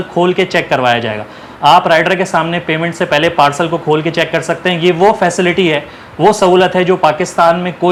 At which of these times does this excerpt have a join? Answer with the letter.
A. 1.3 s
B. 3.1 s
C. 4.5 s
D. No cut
D